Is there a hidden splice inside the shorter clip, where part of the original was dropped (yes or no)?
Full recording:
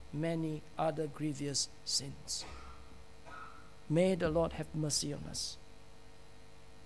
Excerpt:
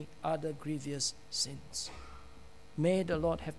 yes